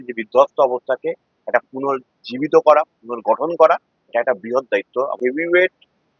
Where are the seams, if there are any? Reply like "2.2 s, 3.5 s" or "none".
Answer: 5.2 s